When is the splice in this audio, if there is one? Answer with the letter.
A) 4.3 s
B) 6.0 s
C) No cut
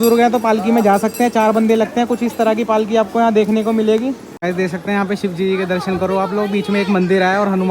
A